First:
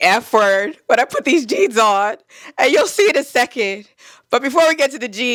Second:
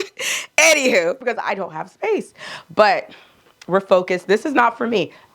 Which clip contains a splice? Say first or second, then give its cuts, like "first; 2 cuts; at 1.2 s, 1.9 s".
second; 1 cut; at 1.2 s